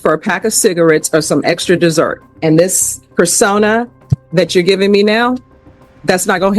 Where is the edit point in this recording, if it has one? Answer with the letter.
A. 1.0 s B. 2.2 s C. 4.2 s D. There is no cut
B